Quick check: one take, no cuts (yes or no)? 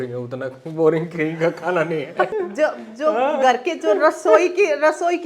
no